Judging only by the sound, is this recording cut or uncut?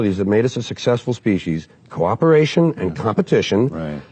uncut